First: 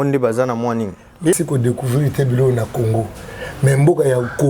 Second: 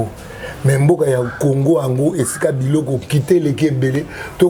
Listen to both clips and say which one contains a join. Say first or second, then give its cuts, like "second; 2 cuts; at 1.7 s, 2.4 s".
first; 1 cut; at 1.4 s